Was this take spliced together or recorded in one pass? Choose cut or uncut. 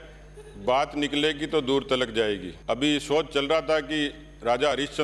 cut